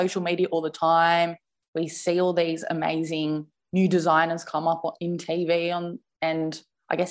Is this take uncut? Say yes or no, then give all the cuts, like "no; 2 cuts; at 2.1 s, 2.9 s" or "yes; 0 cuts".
yes; 0 cuts